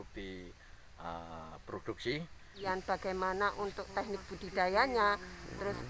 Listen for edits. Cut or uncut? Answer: cut